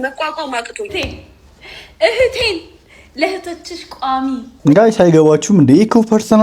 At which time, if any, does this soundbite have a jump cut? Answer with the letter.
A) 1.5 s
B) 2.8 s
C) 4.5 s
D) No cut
C